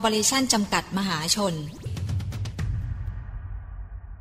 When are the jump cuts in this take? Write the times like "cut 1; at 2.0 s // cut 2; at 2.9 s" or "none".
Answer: cut 1; at 1.9 s